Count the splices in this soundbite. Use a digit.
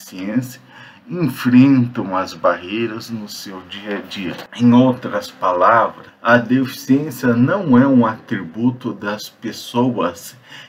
2